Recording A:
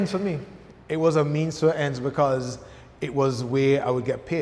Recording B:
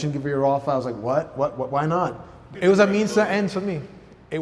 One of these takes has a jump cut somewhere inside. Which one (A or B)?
B